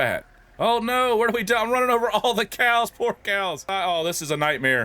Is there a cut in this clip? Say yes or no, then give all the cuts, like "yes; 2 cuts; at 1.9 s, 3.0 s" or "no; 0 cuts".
yes; 1 cut; at 3.7 s